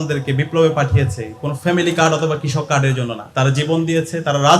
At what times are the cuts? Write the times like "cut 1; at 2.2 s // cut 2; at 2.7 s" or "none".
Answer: cut 1; at 3.2 s